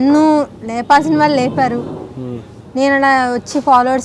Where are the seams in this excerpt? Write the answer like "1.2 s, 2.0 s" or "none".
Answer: none